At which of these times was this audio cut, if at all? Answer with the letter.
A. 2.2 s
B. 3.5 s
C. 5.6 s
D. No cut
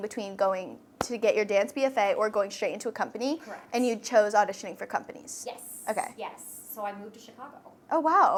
D